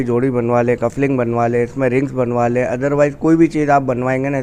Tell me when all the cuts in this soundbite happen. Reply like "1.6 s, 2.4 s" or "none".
none